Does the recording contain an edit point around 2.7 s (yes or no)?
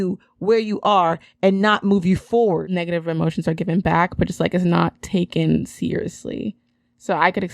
yes